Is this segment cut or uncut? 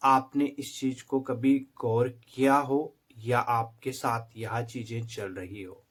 uncut